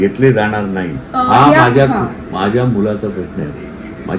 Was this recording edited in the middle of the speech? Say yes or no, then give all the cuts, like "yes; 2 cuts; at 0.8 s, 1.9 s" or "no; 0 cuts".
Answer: yes; 1 cut; at 1.0 s